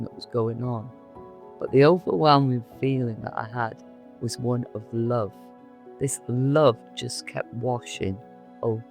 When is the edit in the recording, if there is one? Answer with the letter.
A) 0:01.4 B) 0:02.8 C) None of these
A